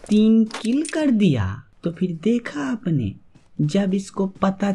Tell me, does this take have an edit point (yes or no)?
yes